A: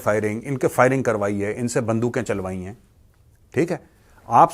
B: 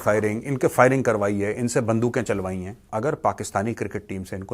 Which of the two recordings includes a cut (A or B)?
B